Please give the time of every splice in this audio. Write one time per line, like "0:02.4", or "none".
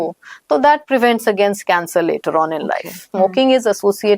0:03.1